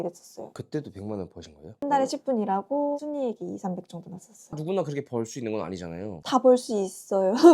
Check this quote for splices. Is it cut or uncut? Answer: cut